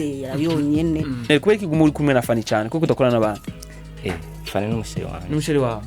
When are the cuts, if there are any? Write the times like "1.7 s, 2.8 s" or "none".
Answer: 1.3 s